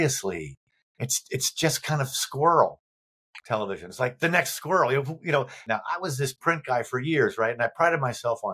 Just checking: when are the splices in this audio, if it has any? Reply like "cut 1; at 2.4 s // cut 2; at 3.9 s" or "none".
cut 1; at 5.7 s